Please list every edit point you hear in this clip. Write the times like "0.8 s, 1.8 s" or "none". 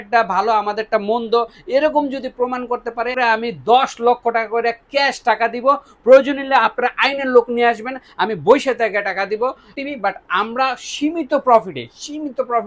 3.1 s, 9.8 s